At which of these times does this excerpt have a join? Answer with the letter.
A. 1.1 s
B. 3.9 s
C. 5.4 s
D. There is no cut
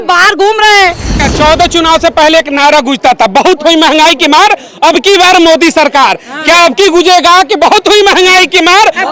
A